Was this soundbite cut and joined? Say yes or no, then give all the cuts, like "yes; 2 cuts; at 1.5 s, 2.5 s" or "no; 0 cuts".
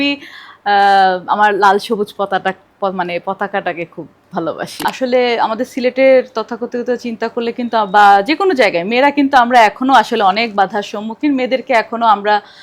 yes; 1 cut; at 4.7 s